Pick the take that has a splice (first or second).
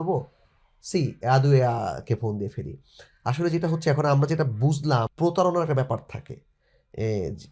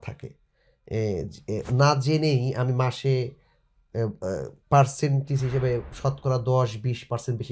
first